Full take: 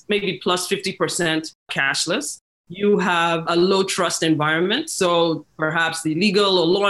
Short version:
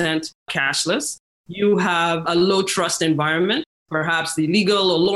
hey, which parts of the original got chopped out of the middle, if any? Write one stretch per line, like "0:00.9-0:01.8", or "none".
0:04.9-0:05.4